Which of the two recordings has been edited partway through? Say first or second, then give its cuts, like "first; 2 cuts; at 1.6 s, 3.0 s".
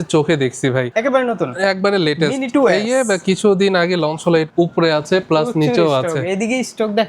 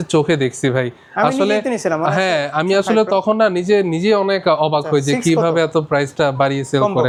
first; 2 cuts; at 0.9 s, 4.5 s